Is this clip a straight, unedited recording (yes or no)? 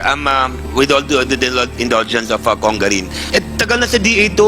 no